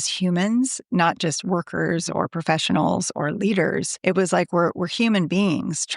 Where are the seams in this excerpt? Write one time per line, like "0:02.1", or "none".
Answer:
0:03.9